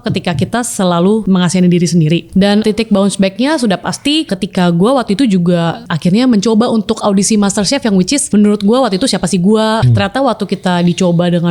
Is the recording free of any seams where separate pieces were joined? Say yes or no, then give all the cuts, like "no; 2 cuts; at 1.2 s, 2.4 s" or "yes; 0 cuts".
no; 6 cuts; at 1.2 s, 2.6 s, 4.3 s, 5.9 s, 8.2 s, 9.8 s